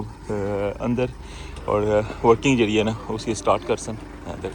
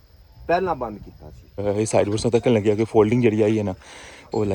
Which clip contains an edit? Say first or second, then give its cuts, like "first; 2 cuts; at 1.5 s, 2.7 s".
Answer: second; 1 cut; at 1.6 s